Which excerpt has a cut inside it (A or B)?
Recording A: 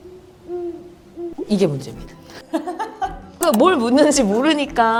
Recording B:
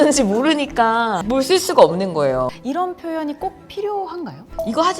B